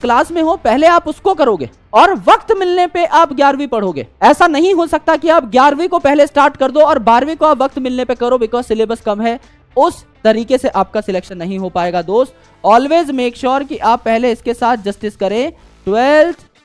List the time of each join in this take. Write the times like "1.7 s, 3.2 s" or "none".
none